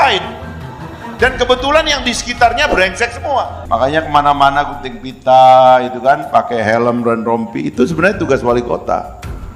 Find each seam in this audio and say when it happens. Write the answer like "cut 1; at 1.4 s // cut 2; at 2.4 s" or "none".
cut 1; at 3.6 s